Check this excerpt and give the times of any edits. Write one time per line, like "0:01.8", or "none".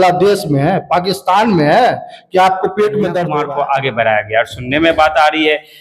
0:03.3